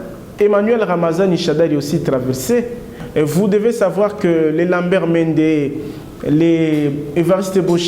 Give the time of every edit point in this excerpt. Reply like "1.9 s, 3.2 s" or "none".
2.9 s